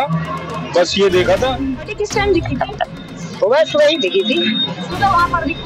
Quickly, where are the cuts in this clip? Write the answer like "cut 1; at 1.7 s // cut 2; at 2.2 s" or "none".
cut 1; at 2.0 s